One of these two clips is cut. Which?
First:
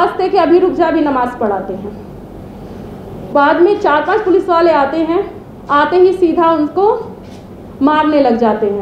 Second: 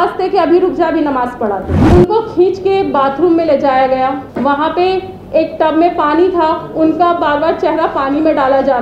second; 2 cuts; at 1.7 s, 4.3 s

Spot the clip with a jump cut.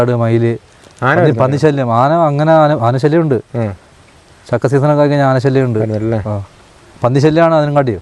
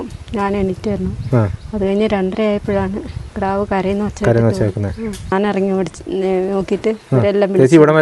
second; 1 cut; at 5.3 s

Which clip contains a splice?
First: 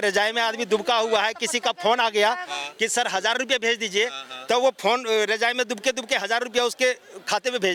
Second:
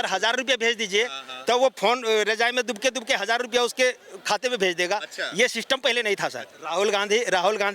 second; 1 cut; at 6.5 s

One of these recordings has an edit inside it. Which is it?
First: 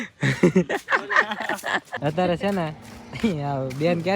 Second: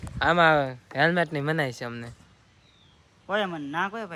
first; 1 cut; at 1.9 s

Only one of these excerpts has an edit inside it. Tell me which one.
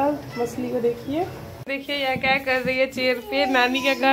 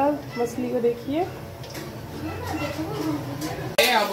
first; 1 cut; at 1.6 s

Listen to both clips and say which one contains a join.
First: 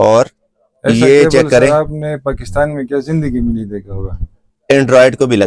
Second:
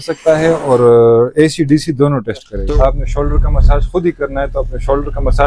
second; 1 cut; at 2.5 s

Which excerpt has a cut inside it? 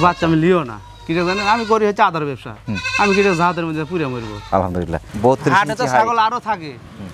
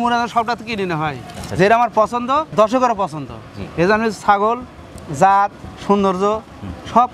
first; 1 cut; at 5.0 s

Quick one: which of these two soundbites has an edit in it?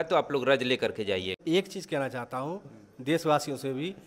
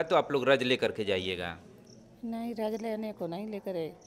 first; 1 cut; at 1.4 s

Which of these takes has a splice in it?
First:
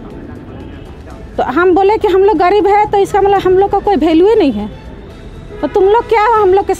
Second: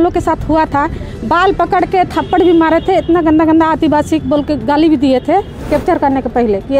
second; 1 cut; at 5.6 s

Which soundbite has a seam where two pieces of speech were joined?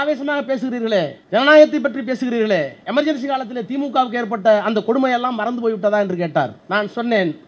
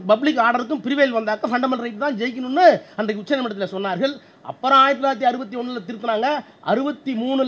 first; 3 cuts; at 1.2 s, 2.8 s, 6.6 s

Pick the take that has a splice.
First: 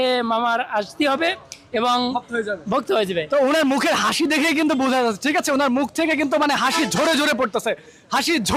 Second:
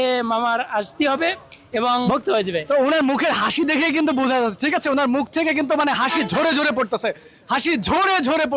second; 1 cut; at 2.1 s

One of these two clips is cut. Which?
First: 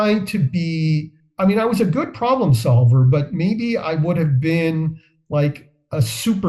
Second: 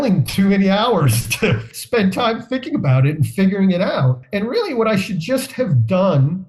second; 2 cuts; at 1.7 s, 4.2 s

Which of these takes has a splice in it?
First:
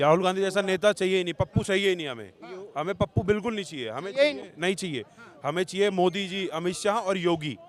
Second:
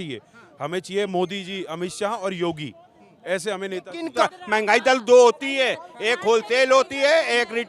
second; 1 cut; at 4.2 s

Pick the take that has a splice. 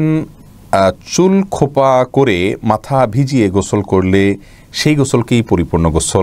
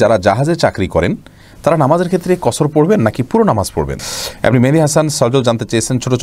second; 1 cut; at 3.9 s

